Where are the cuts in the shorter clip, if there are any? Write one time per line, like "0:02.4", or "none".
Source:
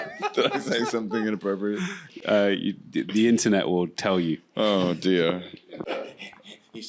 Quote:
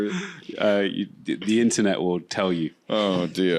none

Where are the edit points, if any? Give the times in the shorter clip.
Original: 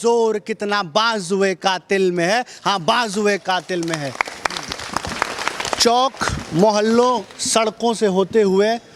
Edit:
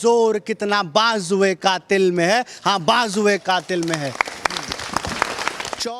none

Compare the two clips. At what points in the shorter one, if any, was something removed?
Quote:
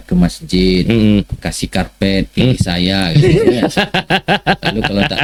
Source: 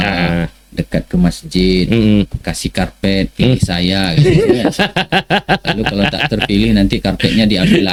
none

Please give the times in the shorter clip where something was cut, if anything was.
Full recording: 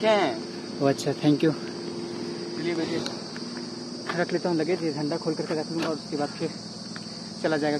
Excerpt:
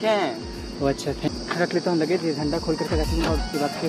0:01.3

